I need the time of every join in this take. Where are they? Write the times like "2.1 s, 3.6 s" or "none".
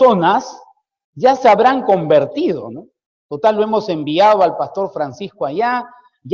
4.2 s